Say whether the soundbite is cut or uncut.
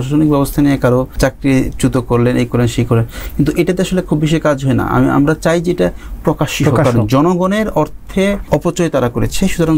cut